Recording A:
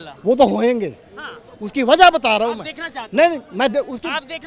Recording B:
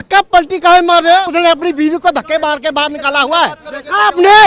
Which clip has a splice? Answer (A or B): B